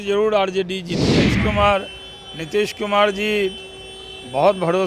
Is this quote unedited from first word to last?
no; 1 cut; at 1.2 s

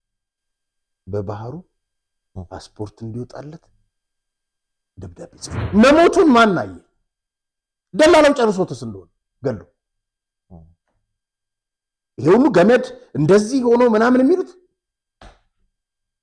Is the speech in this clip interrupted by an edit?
yes; 1 cut; at 5.6 s

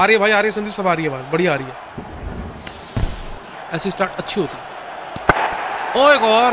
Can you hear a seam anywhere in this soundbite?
yes; 1 cut; at 3.6 s

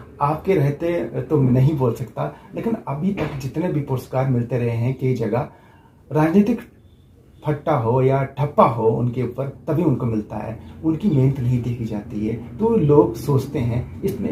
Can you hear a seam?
no; 0 cuts

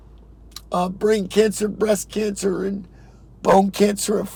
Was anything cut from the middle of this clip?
no; 0 cuts

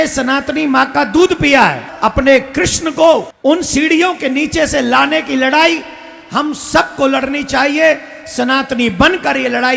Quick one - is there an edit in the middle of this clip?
yes; 2 cuts; at 1.9 s, 3.3 s

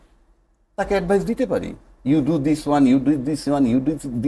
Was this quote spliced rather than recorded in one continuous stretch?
no; 0 cuts

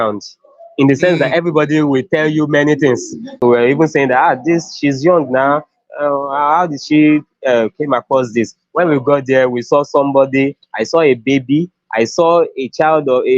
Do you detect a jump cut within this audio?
yes; 1 cut; at 3.3 s

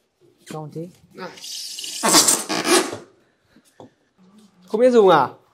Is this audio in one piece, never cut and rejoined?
no; 1 cut; at 4.1 s

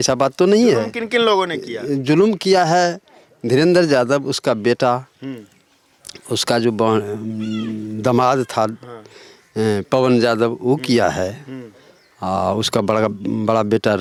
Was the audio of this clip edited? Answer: no; 0 cuts

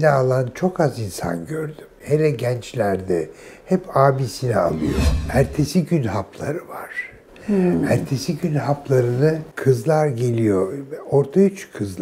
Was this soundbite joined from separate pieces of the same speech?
yes; 2 cuts; at 5.1 s, 9.5 s

